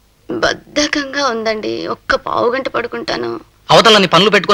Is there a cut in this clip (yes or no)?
no